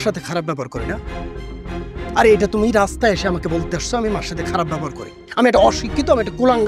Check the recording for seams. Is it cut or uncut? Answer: uncut